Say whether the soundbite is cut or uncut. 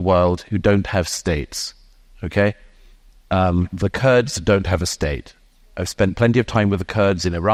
uncut